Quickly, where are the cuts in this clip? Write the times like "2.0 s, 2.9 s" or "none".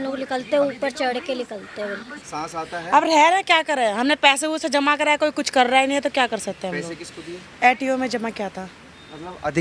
2.2 s, 7.4 s